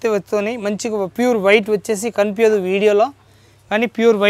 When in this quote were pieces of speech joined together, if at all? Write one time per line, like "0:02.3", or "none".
none